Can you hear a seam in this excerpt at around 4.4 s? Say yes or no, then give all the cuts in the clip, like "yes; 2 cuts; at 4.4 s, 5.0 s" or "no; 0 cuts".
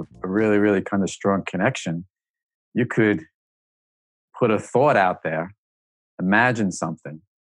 no; 0 cuts